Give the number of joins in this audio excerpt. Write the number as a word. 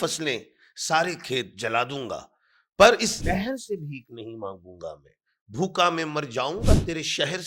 one